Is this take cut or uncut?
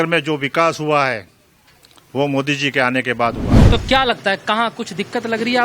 cut